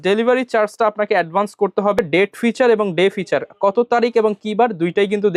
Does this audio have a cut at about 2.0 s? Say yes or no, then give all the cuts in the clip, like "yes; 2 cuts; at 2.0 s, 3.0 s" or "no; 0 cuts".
yes; 1 cut; at 2.0 s